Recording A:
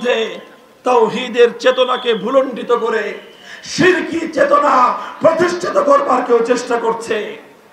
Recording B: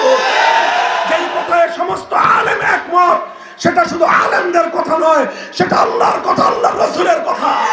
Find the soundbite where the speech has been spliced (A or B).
B